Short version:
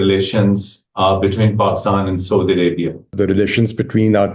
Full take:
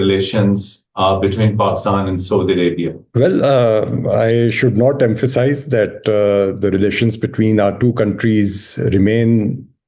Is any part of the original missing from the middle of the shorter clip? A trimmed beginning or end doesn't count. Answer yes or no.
yes